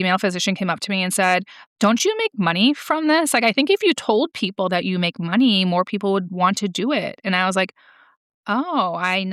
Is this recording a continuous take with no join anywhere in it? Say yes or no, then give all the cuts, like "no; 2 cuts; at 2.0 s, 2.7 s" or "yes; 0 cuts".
yes; 0 cuts